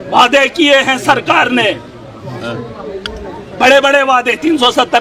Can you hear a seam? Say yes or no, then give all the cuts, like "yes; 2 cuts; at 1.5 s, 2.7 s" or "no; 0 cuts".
no; 0 cuts